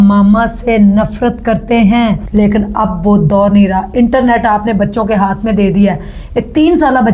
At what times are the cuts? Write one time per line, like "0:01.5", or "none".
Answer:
0:02.2